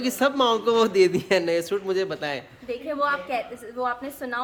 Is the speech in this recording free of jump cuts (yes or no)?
yes